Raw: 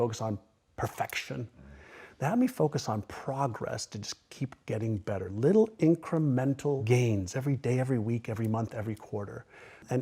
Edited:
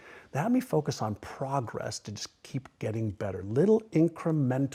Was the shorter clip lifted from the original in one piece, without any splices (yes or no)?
yes